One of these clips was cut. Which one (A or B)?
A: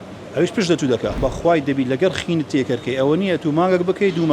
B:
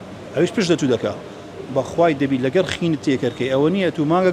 A